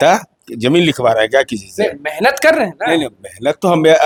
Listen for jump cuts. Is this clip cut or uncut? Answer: uncut